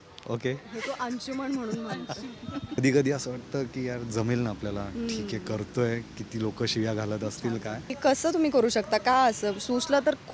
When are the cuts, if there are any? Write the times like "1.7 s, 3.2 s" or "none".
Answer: 2.8 s, 7.9 s